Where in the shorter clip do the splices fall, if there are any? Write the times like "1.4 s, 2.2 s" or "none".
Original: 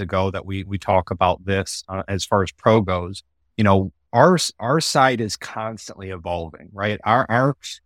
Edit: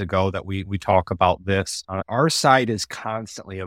2.0 s